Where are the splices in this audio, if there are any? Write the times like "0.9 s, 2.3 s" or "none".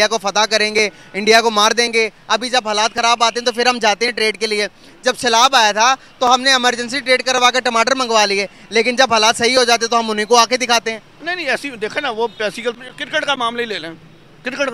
12.7 s